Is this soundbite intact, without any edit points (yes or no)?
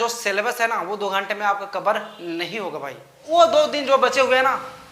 no